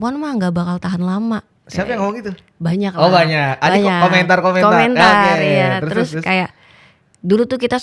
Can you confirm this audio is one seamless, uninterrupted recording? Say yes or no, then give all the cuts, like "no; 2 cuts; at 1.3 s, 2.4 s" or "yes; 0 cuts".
yes; 0 cuts